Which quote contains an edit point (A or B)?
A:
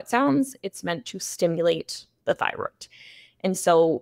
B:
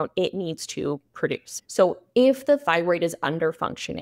B